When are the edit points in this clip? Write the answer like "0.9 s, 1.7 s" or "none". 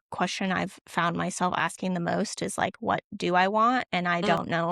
none

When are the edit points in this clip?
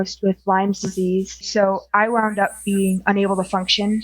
1.4 s

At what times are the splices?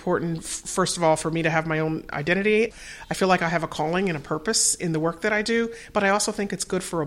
2.7 s

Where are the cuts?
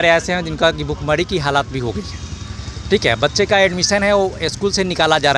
none

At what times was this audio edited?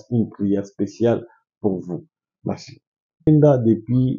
3.3 s

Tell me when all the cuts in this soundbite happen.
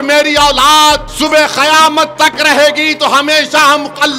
1.1 s

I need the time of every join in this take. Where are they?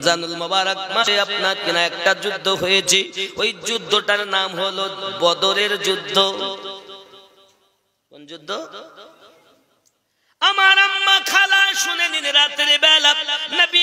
1.1 s

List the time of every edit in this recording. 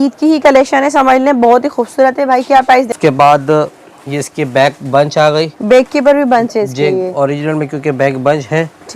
2.9 s

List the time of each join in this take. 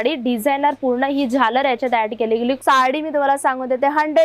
2.6 s

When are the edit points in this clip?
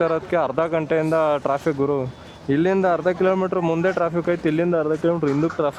none

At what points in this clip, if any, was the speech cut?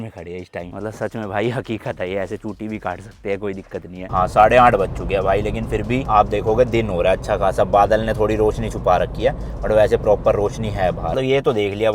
4.1 s, 11.1 s

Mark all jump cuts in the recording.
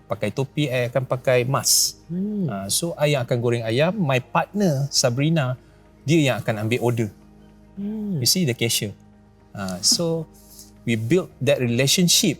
none

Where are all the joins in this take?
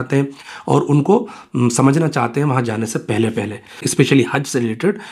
3.9 s

